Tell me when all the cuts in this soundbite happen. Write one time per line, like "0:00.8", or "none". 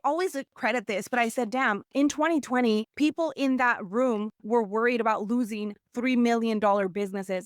0:02.9